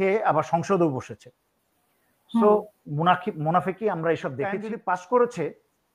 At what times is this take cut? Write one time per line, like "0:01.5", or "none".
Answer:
0:04.7